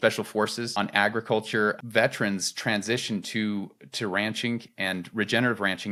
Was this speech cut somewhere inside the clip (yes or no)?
no